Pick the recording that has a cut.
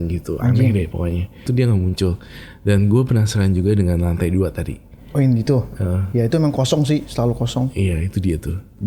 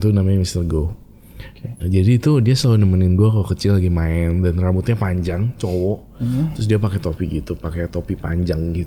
first; 1 cut; at 1.5 s

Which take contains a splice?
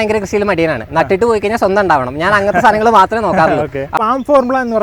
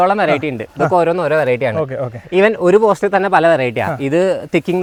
first; 1 cut; at 3.9 s

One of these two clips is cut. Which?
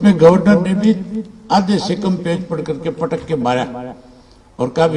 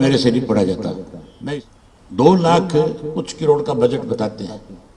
second; 1 cut; at 1.5 s

